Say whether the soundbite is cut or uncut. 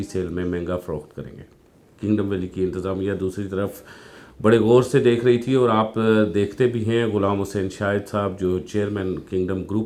uncut